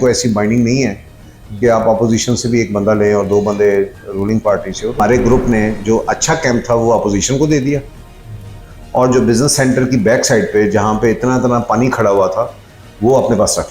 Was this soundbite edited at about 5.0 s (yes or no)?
yes